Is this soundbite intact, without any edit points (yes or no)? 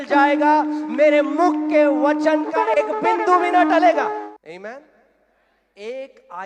no